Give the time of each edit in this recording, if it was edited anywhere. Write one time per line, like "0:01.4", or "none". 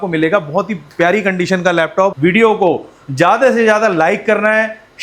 0:02.1